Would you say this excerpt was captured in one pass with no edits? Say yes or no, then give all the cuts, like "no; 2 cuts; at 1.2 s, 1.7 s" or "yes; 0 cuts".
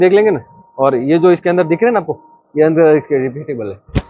yes; 0 cuts